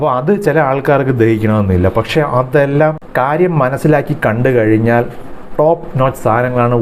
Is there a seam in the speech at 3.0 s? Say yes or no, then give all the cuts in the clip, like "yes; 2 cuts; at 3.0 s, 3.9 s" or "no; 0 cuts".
no; 0 cuts